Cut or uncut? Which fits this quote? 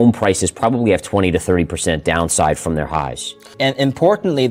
uncut